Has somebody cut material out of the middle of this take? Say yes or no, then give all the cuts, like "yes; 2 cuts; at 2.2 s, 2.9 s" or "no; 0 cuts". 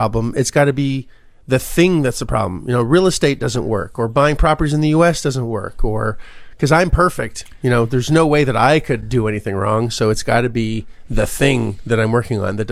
no; 0 cuts